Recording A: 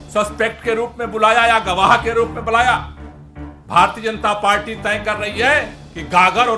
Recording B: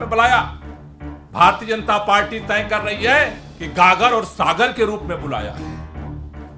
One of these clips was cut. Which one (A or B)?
B